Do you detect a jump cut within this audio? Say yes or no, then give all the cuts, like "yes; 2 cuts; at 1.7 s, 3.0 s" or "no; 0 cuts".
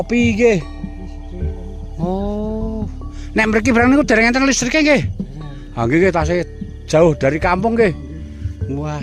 no; 0 cuts